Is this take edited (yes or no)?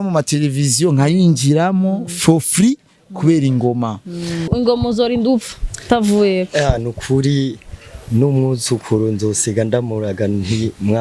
yes